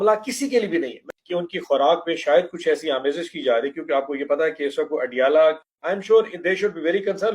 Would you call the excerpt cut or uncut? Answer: cut